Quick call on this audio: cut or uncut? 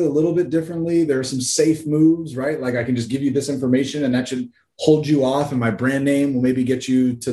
uncut